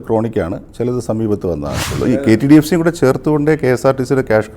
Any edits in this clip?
yes; 1 cut; at 1.9 s

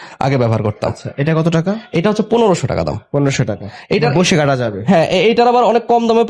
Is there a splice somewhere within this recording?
no; 0 cuts

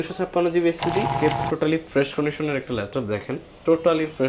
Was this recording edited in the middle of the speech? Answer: yes; 1 cut; at 1.1 s

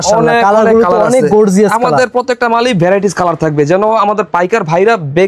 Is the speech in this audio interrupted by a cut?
no; 0 cuts

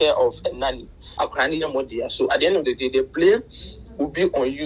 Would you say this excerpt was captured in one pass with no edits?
no; 1 cut; at 1.0 s

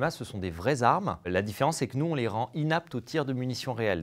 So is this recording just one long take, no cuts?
no; 1 cut; at 1.3 s

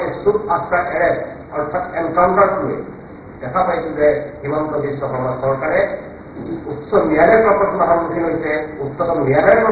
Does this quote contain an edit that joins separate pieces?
no; 0 cuts

